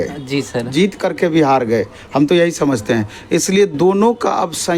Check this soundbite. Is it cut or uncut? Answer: uncut